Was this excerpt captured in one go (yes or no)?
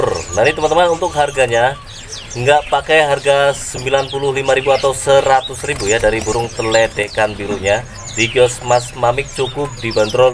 yes